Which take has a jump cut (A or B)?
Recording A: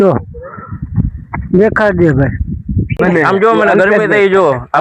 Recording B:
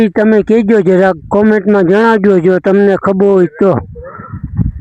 A